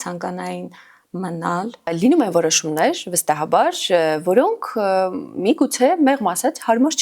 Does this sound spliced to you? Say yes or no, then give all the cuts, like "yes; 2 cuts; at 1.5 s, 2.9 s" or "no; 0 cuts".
yes; 1 cut; at 1.9 s